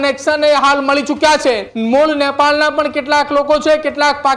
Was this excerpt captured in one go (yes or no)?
no